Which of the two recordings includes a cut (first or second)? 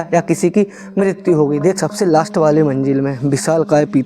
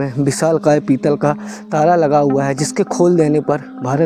first